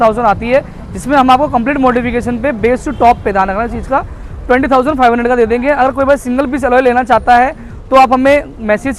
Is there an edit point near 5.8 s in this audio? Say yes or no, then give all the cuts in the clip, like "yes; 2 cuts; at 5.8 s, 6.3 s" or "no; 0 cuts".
no; 0 cuts